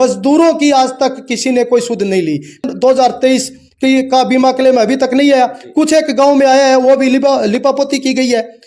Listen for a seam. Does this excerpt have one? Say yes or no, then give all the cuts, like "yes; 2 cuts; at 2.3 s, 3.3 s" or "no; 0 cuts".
yes; 1 cut; at 2.6 s